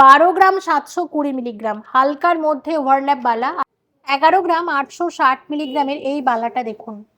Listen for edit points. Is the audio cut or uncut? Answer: cut